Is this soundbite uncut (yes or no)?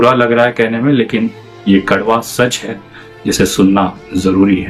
yes